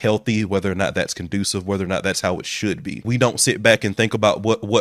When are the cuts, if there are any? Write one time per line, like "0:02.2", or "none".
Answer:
0:03.1